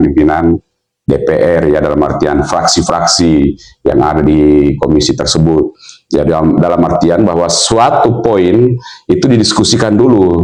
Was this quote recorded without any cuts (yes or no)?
yes